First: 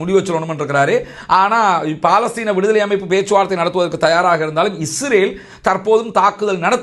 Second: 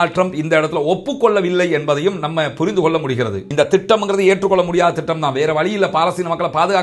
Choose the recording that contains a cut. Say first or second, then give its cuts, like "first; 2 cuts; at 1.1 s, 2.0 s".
second; 1 cut; at 3.3 s